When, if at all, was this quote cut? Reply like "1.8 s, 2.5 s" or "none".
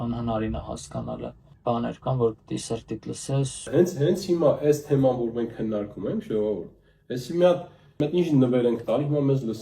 1.5 s, 3.7 s, 8.0 s